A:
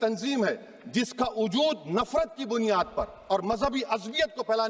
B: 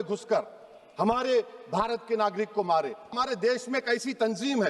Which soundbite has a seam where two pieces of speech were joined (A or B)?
B